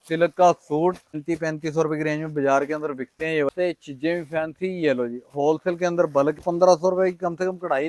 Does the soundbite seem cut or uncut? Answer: cut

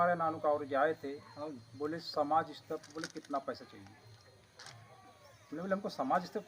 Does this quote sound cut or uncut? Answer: uncut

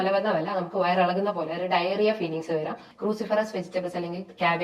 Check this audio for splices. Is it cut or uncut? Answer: cut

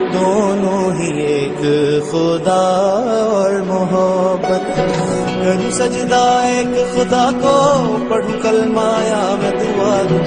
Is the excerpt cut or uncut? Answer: uncut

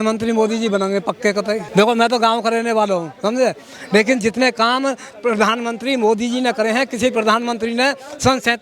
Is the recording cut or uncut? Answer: cut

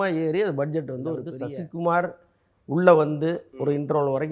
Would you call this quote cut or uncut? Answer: cut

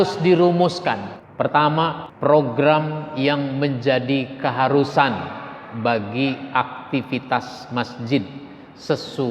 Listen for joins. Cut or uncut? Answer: cut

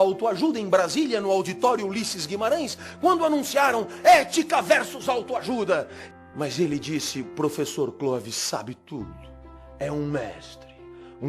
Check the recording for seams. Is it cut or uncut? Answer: cut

